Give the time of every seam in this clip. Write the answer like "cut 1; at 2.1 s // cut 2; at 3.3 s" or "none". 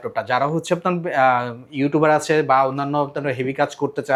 none